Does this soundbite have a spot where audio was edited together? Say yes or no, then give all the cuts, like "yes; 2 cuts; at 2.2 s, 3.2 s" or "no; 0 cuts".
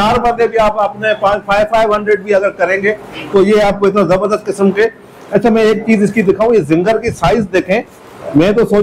no; 0 cuts